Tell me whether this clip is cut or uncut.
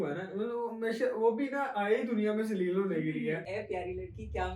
cut